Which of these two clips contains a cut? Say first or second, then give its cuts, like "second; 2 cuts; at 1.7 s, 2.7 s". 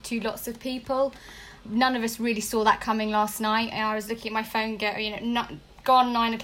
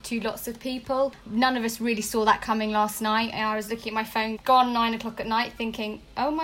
second; 2 cuts; at 1.2 s, 4.4 s